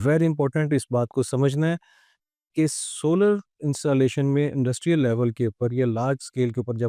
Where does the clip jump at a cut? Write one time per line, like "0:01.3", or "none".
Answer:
none